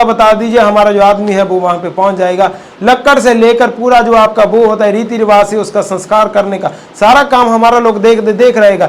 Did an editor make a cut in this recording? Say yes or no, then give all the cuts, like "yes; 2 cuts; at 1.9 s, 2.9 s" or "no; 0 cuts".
no; 0 cuts